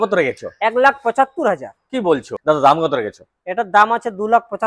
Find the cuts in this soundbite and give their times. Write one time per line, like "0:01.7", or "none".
0:02.3